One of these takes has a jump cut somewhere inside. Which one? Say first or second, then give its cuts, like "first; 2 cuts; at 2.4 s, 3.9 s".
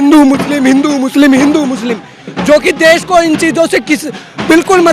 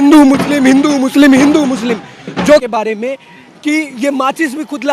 second; 1 cut; at 2.6 s